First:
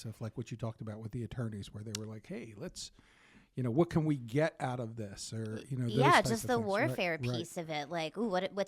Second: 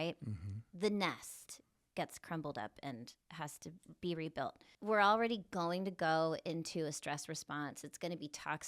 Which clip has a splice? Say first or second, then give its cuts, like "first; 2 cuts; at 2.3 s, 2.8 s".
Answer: second; 1 cut; at 4.7 s